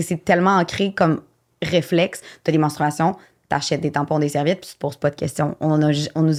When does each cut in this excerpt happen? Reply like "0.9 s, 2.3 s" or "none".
none